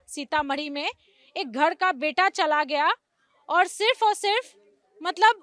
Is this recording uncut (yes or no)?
yes